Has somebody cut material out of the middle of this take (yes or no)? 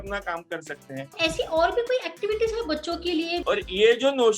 yes